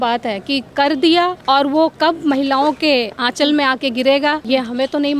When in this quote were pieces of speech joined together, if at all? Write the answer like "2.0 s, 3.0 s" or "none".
1.4 s, 4.4 s